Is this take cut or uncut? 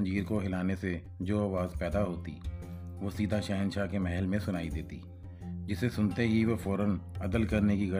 uncut